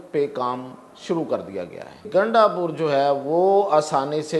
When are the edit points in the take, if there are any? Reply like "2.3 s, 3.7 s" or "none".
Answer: 2.0 s

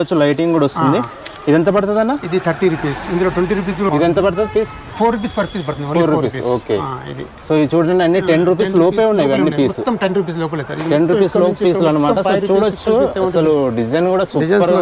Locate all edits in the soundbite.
3.9 s

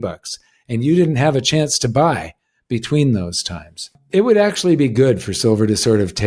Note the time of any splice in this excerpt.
4.0 s

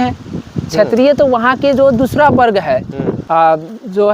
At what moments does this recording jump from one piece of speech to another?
3.2 s

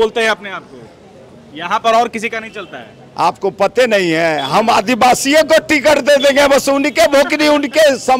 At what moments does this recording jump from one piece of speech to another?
none

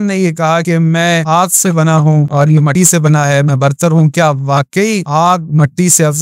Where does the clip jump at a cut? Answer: 0.9 s, 2.6 s, 5.0 s

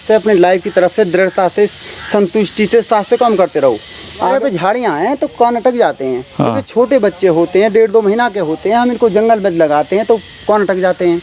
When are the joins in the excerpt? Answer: 4.3 s

